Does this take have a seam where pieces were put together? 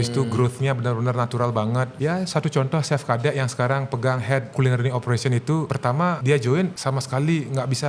yes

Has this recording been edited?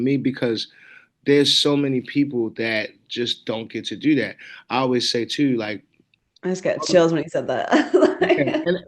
no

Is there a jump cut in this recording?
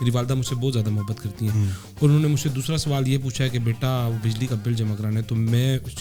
no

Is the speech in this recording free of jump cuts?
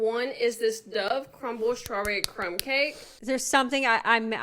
yes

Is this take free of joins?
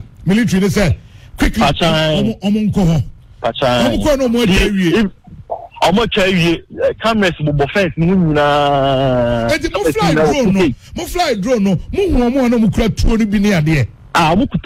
yes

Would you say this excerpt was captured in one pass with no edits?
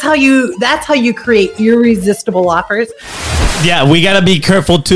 no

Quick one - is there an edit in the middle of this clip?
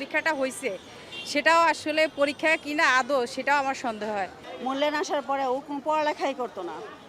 no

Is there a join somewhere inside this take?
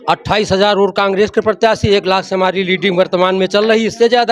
no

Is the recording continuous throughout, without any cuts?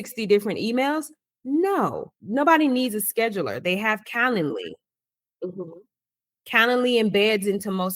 no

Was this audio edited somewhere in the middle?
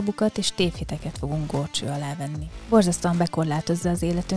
no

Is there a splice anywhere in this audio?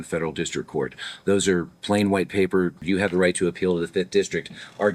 yes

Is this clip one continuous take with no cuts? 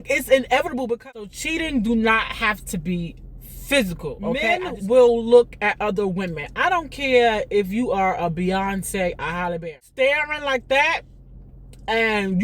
no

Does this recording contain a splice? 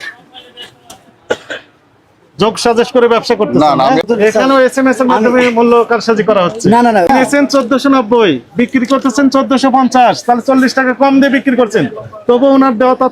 yes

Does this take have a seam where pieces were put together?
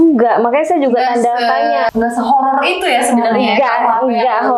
no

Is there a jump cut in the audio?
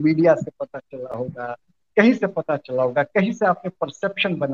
no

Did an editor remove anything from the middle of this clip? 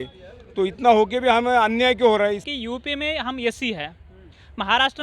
yes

